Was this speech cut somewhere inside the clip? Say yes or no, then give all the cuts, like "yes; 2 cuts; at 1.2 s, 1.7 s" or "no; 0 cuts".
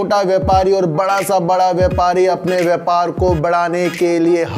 no; 0 cuts